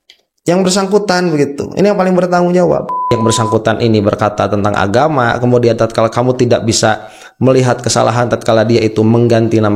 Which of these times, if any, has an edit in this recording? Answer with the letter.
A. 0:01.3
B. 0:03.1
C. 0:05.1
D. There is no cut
B